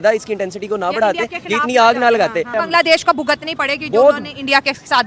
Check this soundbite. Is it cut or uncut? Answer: cut